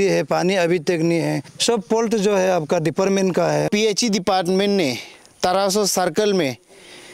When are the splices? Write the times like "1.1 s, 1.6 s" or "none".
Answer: 1.5 s, 3.7 s